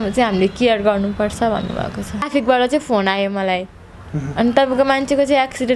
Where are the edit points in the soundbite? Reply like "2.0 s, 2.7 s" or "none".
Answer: 2.3 s